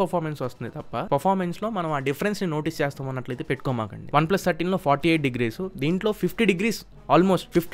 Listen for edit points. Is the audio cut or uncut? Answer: cut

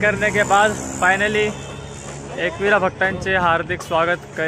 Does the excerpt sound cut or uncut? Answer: uncut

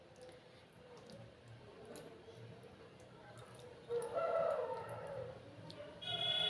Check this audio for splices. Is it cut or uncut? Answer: uncut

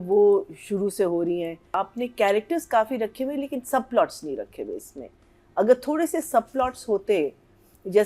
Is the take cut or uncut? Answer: cut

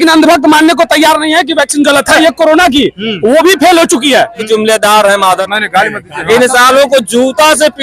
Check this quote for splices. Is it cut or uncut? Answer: cut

